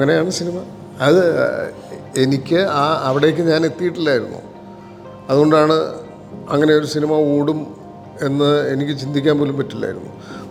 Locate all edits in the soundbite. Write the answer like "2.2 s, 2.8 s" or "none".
none